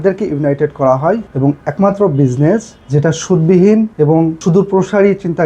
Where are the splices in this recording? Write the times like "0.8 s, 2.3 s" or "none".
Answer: 1.3 s, 2.8 s, 4.1 s